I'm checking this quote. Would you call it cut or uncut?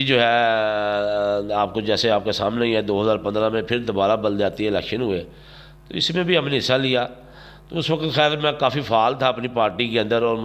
uncut